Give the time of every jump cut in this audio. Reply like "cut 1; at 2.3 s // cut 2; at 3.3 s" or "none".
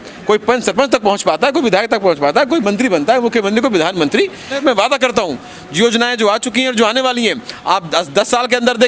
cut 1; at 4.5 s

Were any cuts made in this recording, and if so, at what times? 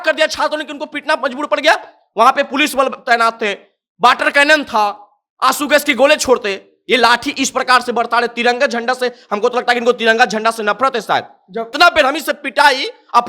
cut 1; at 11.7 s

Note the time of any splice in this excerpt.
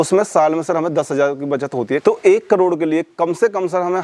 cut 1; at 2.0 s

